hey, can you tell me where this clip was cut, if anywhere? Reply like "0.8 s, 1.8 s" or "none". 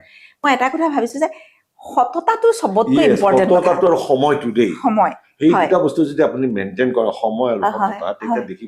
none